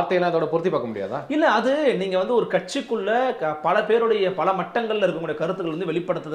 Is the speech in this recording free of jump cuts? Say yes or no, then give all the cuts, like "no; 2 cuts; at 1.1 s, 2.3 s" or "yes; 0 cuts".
yes; 0 cuts